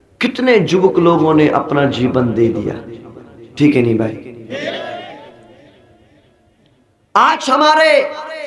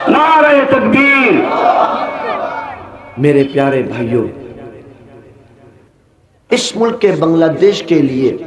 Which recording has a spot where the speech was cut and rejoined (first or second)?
second